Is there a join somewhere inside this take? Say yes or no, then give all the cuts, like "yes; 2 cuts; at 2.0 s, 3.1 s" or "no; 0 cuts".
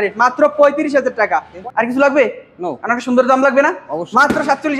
yes; 1 cut; at 1.6 s